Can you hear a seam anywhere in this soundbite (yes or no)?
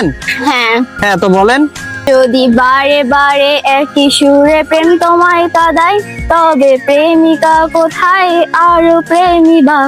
yes